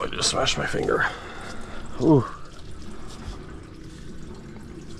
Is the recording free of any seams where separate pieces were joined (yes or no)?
yes